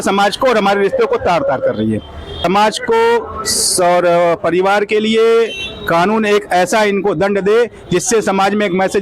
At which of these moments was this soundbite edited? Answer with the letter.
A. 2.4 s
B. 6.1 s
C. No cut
A